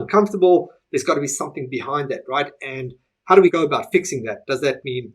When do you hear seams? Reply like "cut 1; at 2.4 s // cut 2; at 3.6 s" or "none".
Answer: cut 1; at 3.5 s